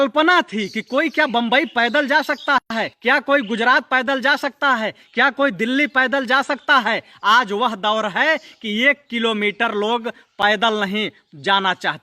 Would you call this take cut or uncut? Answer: uncut